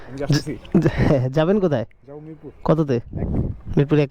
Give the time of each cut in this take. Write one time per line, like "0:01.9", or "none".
none